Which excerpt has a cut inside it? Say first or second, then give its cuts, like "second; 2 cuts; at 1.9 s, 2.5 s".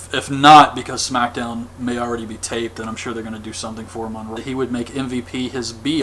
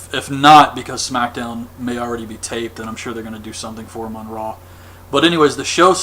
second; 1 cut; at 4.3 s